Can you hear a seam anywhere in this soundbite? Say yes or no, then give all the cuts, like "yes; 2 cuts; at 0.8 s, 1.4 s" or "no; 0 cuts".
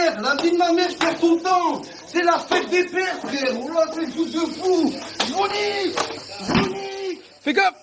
yes; 1 cut; at 6.3 s